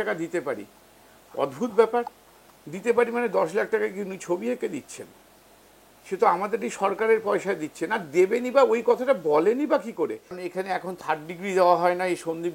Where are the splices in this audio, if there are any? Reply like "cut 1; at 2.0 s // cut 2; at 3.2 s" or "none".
cut 1; at 10.5 s